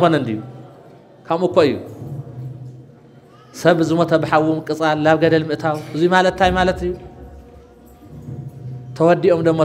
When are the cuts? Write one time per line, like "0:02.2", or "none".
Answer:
none